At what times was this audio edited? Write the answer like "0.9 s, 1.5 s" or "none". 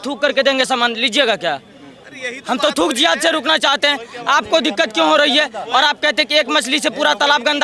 2.0 s

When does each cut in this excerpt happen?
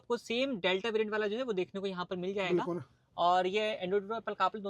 none

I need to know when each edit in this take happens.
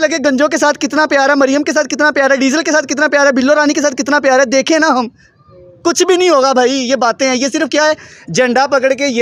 none

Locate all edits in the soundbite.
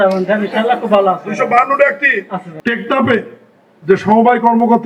2.4 s

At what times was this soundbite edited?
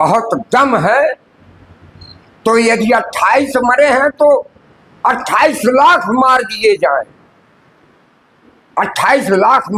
none

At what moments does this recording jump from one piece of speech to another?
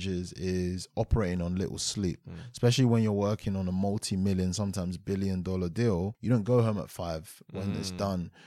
6.2 s

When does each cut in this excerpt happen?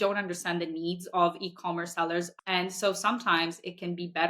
2.3 s

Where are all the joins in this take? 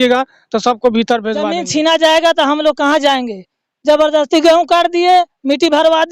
1.6 s

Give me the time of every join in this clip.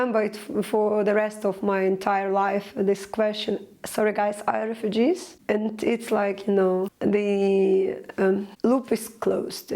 5.3 s, 6.9 s, 8.5 s

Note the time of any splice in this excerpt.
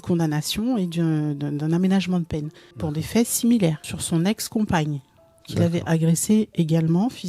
2.8 s, 3.9 s

